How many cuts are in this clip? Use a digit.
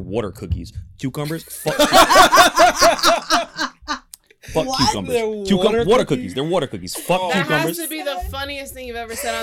0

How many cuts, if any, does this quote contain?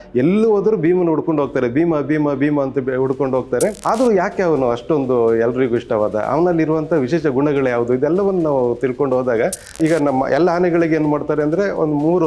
2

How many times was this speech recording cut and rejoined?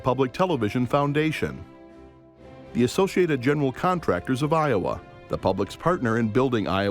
0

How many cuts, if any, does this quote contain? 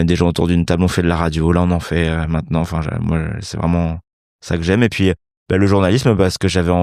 0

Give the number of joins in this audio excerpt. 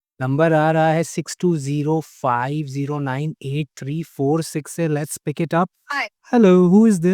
1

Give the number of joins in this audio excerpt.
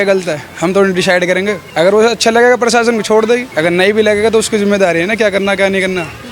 2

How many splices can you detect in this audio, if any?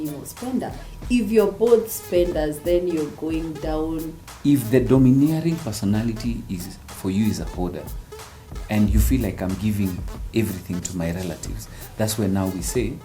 1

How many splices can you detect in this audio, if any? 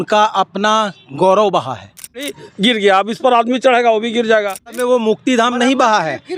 2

